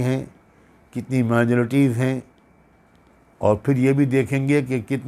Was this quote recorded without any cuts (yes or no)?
yes